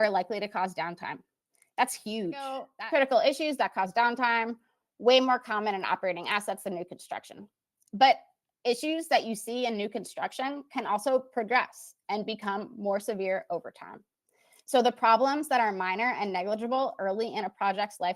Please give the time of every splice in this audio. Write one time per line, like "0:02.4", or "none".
0:02.7